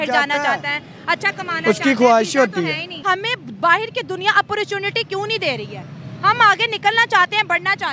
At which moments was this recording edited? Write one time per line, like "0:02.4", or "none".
0:03.1